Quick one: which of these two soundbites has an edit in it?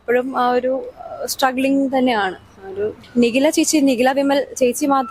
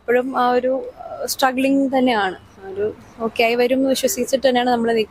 first; 1 cut; at 3.0 s

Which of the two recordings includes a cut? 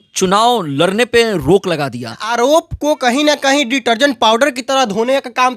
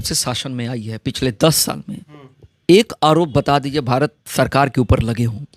first; 1 cut; at 2.2 s

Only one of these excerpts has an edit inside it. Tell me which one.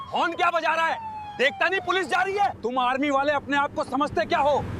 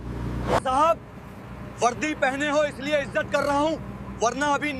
first; 1 cut; at 2.6 s

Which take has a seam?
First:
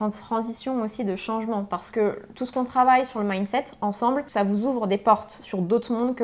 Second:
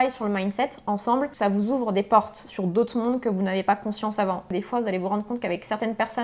second; 1 cut; at 4.5 s

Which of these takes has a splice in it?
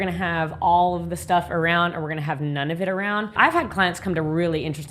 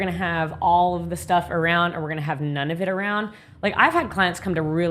first; 1 cut; at 3.3 s

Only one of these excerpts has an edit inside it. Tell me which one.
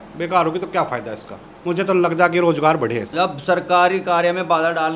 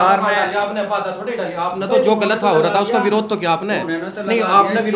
first; 1 cut; at 3.1 s

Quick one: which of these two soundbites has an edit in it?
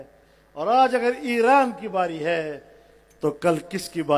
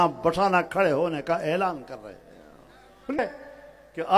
second; 1 cut; at 3.2 s

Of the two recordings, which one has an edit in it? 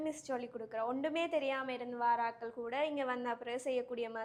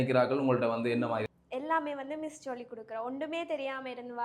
second; 1 cut; at 1.3 s

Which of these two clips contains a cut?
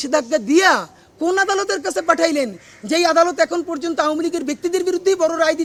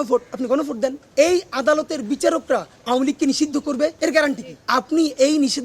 second; 3 cuts; at 1.0 s, 3.9 s, 4.5 s

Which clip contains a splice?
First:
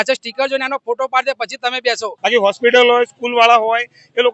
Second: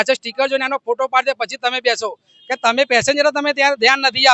first; 1 cut; at 2.1 s

